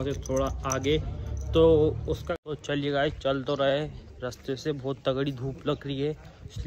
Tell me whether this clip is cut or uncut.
cut